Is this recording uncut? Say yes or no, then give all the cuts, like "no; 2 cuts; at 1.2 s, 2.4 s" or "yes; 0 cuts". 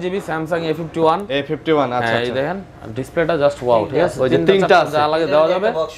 yes; 0 cuts